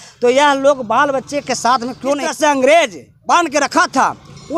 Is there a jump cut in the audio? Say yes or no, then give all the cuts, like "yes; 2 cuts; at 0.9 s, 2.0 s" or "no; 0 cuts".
yes; 1 cut; at 2.3 s